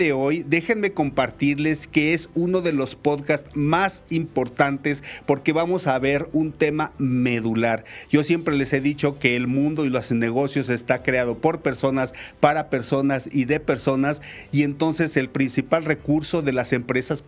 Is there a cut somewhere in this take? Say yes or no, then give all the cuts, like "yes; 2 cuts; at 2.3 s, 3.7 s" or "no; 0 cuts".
no; 0 cuts